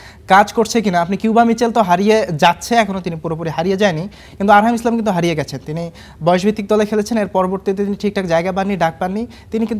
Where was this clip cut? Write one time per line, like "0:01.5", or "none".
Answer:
none